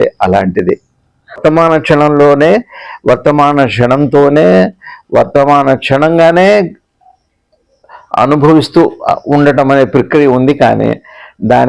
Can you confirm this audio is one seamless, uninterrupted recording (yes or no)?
no